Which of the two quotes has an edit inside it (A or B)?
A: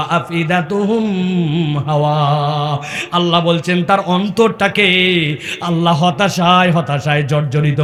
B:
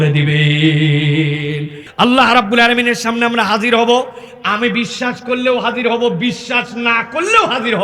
B